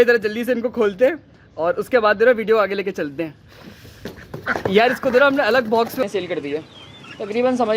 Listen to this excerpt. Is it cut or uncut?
cut